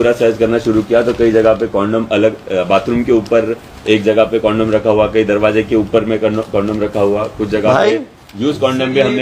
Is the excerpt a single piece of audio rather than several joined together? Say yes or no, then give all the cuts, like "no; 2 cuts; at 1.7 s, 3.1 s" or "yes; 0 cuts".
yes; 0 cuts